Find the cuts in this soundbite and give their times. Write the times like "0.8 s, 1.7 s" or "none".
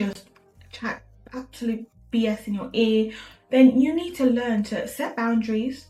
none